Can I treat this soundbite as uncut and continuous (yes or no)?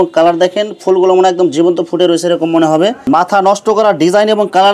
no